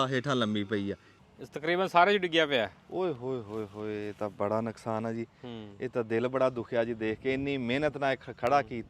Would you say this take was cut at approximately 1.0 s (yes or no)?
yes